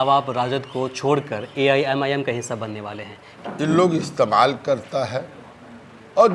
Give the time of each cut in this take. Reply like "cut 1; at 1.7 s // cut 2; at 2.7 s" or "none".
cut 1; at 3.3 s